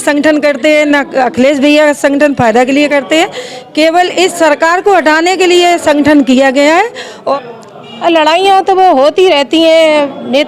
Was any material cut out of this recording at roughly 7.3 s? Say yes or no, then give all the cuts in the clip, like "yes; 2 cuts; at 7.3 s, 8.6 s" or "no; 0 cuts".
yes; 1 cut; at 7.3 s